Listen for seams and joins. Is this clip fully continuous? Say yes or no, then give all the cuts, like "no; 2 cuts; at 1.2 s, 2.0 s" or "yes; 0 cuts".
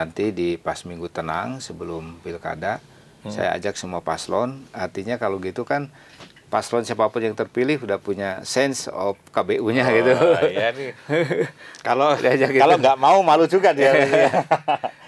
yes; 0 cuts